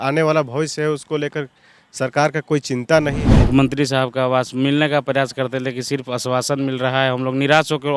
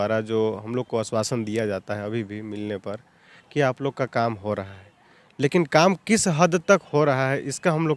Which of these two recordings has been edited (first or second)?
first